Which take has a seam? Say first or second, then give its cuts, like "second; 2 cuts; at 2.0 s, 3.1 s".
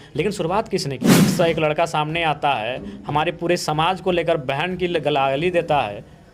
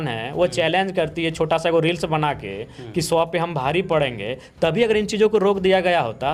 first; 1 cut; at 1.1 s